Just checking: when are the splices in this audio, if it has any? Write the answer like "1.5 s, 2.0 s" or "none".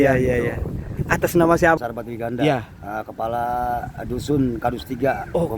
1.8 s